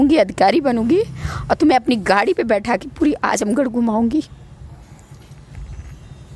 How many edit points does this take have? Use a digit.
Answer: 0